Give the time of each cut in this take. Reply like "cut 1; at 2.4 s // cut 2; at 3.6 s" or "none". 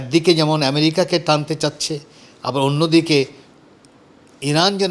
none